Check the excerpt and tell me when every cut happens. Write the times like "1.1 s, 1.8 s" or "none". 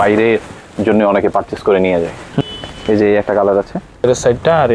2.4 s, 4.0 s